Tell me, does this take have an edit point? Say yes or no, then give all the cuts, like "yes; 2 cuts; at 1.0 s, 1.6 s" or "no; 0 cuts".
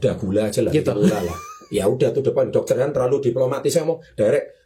no; 0 cuts